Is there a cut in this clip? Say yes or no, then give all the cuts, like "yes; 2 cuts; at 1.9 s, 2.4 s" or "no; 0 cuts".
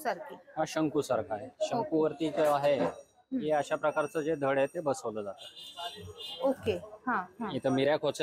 no; 0 cuts